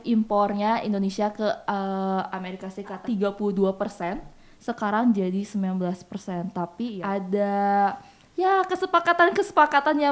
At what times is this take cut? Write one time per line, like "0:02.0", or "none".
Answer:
0:03.0
0:07.0

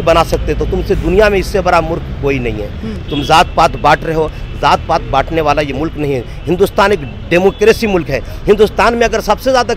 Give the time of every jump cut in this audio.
none

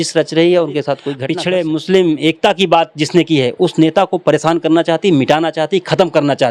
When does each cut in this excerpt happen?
0:01.1

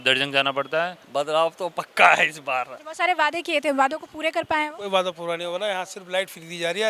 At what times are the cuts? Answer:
0:01.0
0:02.8

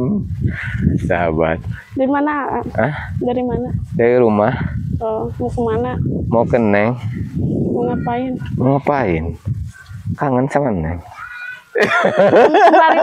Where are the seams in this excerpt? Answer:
none

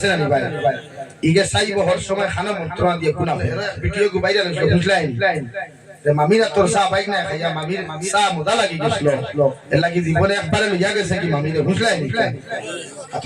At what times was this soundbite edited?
0:03.7

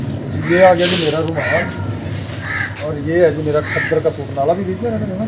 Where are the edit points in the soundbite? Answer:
none

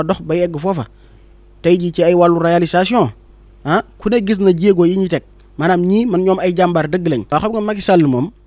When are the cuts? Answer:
0:07.2

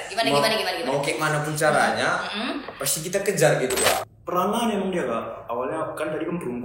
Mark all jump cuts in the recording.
0:04.1

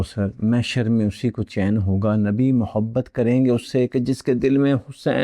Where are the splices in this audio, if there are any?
none

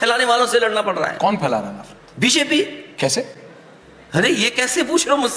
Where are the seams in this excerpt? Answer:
none

